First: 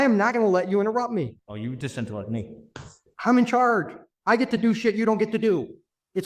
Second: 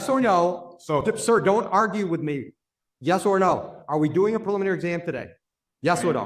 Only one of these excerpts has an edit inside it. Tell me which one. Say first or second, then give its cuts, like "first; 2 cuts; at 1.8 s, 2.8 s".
first; 1 cut; at 1.4 s